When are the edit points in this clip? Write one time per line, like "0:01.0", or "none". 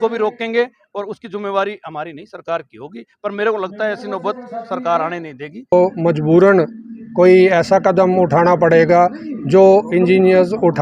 0:05.7

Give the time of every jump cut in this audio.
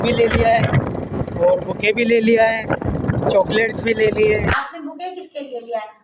0:04.6

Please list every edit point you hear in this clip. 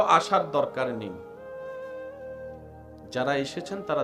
0:01.3
0:03.1

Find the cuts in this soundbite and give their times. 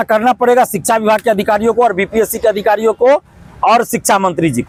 none

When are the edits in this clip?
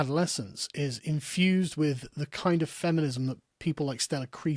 none

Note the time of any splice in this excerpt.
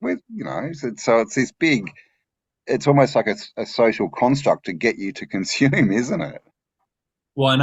none

